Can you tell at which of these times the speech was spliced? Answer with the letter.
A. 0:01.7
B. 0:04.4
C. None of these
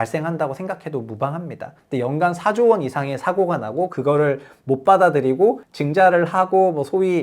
A